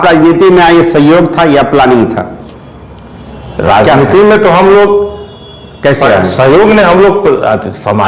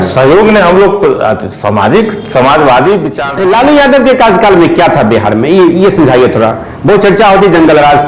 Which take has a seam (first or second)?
second